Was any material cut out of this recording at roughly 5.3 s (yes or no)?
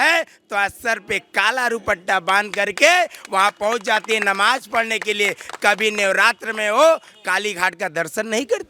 no